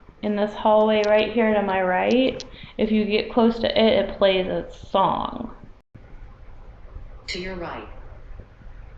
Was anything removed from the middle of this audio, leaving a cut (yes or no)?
yes